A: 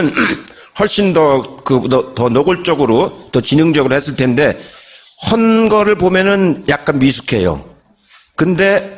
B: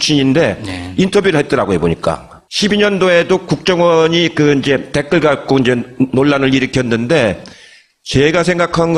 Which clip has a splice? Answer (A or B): B